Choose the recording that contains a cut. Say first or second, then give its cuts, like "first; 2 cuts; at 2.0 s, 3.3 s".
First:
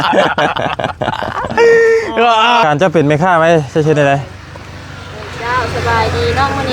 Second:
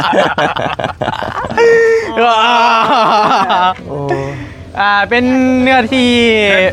first; 1 cut; at 2.6 s